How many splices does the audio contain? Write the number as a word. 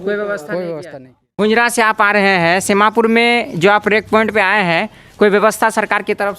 one